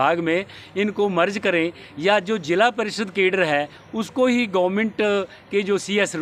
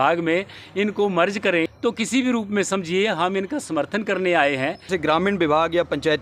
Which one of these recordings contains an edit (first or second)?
second